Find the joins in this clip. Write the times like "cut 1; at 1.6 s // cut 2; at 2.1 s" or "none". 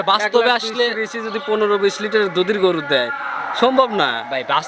none